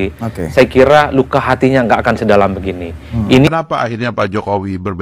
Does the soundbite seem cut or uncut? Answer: cut